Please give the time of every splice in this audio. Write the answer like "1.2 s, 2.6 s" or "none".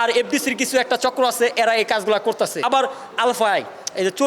2.6 s

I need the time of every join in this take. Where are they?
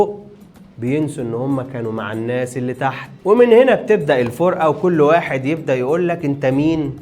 3.1 s

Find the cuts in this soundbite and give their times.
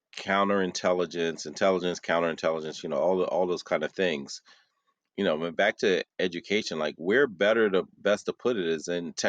none

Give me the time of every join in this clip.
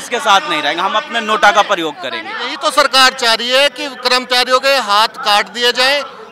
2.4 s

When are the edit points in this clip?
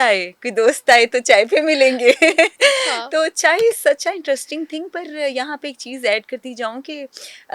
none

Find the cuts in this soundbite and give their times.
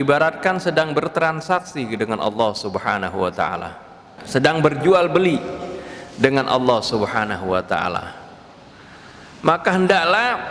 4.2 s

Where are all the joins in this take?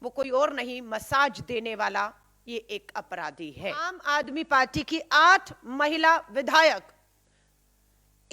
4.0 s

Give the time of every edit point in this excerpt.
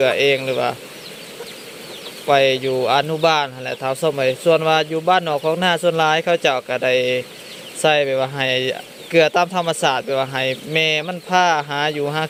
none

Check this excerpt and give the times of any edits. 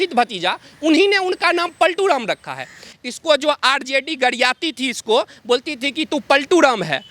2.9 s

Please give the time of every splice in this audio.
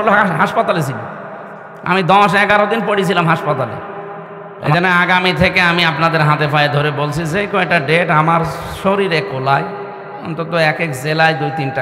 4.7 s

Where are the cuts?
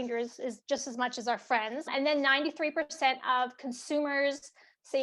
none

